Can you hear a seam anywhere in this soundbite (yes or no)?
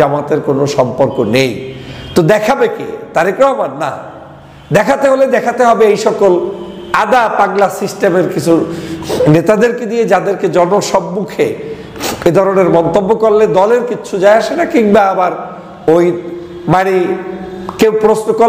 no